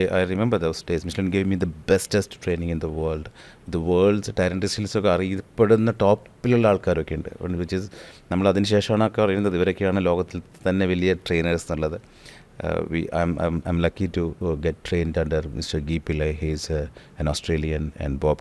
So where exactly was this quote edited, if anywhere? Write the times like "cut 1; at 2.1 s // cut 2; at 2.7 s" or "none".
none